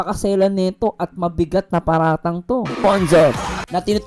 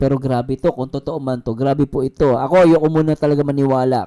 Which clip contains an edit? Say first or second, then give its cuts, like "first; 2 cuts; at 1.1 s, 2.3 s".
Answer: first; 1 cut; at 2.8 s